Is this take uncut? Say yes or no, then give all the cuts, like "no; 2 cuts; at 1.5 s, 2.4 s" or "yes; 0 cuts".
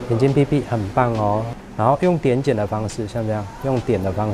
no; 1 cut; at 1.6 s